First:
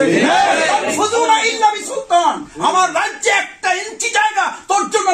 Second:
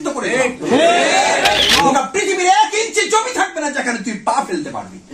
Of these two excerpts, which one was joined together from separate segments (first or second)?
second